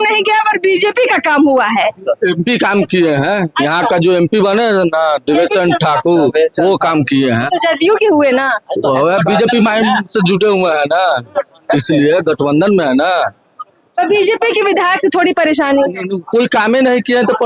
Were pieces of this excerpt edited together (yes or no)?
no